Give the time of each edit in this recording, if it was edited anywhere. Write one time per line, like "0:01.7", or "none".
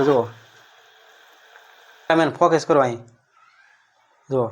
0:02.1

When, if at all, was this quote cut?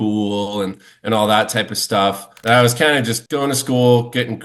0:02.3
0:03.2

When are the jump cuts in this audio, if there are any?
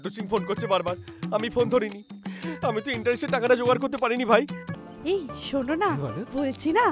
0:04.7

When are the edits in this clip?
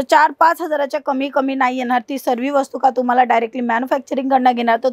none

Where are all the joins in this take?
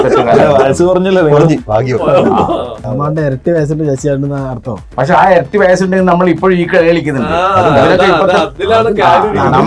0:03.0
0:04.8

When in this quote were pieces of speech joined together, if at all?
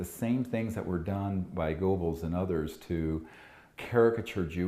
0:02.0

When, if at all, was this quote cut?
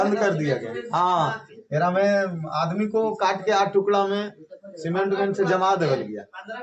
none

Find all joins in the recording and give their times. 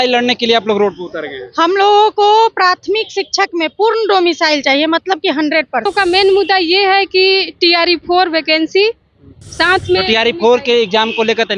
0:05.9

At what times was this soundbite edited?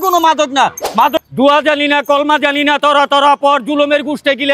0:01.2

